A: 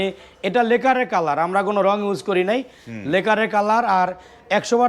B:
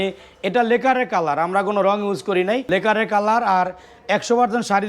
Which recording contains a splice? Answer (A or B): B